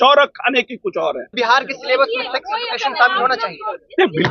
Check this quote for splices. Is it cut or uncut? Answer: cut